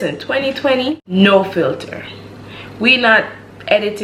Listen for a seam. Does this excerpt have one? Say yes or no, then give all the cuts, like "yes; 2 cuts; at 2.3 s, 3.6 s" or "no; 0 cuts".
yes; 1 cut; at 1.0 s